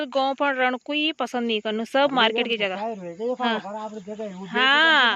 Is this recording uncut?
yes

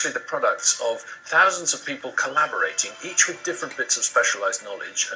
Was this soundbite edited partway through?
no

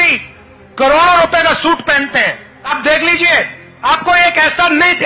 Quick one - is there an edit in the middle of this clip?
yes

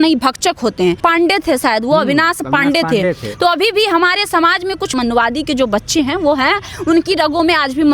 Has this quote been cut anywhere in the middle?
yes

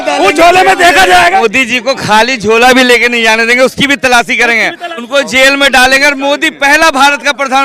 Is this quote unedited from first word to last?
no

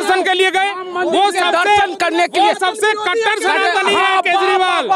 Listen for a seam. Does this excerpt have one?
no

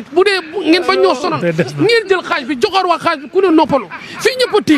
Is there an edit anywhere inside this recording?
no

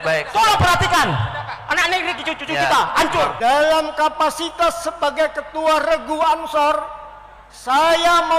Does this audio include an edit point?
yes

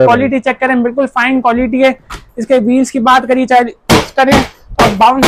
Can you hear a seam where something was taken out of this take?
no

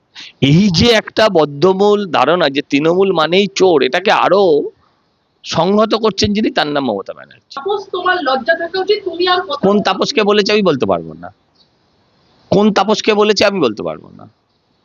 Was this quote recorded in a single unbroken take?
no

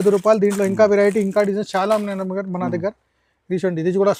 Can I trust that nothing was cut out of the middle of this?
yes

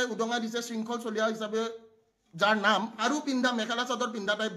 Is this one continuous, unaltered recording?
no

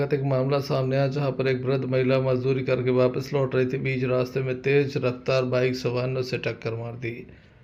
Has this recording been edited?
no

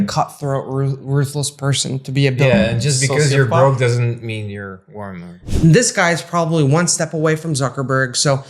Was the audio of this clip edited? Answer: yes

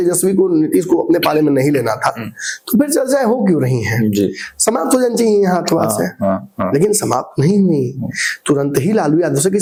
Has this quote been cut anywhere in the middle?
no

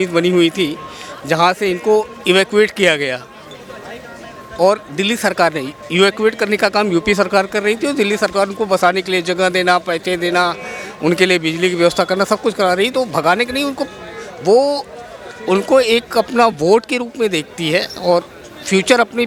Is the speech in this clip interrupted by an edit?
no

